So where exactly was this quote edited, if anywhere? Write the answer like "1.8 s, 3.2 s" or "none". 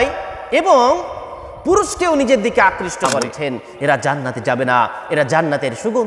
3.2 s